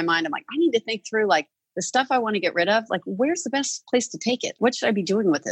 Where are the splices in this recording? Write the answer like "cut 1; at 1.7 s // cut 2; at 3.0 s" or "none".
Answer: cut 1; at 4.6 s